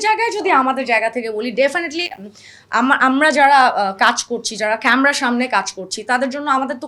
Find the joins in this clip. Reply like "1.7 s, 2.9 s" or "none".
none